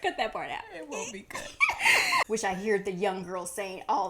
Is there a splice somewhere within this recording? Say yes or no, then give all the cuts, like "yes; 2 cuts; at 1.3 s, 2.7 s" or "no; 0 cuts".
yes; 1 cut; at 2.3 s